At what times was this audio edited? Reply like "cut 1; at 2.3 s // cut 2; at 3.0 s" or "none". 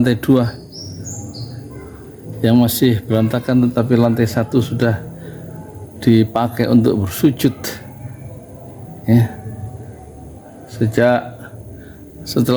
none